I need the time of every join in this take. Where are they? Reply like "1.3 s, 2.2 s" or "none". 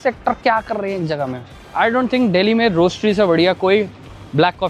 none